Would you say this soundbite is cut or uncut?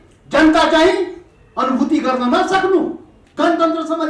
cut